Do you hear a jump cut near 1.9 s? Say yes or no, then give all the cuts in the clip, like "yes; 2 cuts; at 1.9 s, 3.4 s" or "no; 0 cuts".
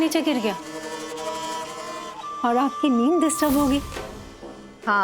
no; 1 cut; at 3.9 s